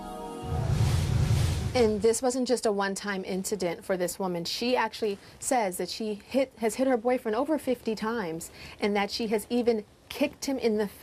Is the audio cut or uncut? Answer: cut